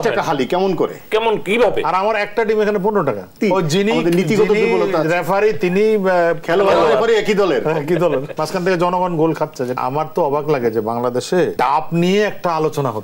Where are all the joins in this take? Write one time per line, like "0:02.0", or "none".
0:03.3
0:08.3
0:09.7
0:11.5